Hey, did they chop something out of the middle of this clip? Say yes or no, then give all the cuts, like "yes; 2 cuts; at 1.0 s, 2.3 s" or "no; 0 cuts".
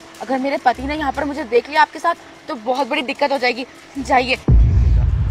yes; 1 cut; at 4.4 s